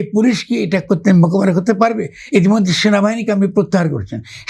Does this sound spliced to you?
no; 0 cuts

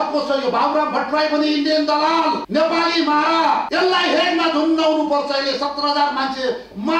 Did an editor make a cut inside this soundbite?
yes; 2 cuts; at 2.4 s, 3.7 s

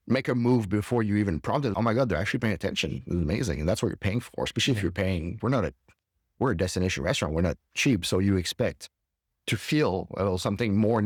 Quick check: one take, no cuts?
yes; 0 cuts

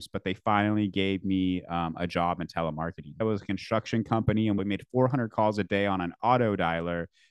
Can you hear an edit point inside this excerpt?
yes; 2 cuts; at 3.2 s, 4.6 s

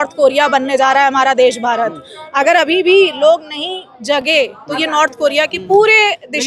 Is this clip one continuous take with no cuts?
yes; 0 cuts

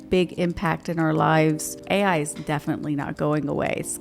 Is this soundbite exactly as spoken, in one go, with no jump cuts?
no; 1 cut; at 1.8 s

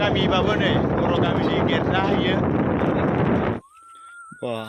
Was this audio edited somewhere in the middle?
yes; 1 cut; at 3.7 s

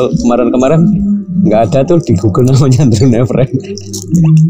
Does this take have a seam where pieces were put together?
no; 0 cuts

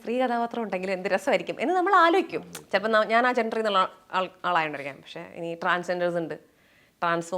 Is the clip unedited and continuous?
yes; 0 cuts

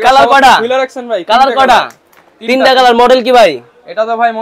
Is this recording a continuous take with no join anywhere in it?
yes; 0 cuts

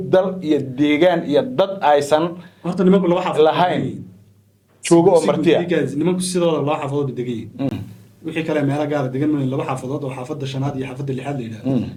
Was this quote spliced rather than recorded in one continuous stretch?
no; 0 cuts

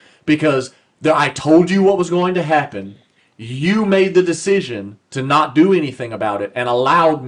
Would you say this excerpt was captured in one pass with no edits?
yes; 0 cuts

